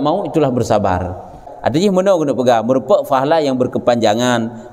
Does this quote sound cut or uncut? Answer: cut